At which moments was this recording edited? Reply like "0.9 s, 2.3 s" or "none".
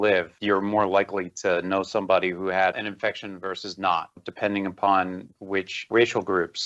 none